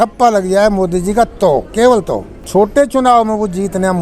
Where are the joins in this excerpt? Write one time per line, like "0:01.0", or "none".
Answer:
0:02.3